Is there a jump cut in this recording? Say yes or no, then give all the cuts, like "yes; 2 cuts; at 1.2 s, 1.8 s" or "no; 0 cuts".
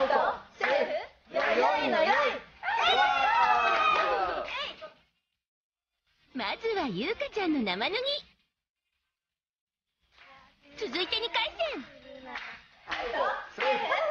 no; 0 cuts